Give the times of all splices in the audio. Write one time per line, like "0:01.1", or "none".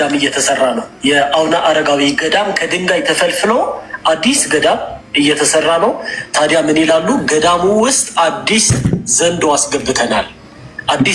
none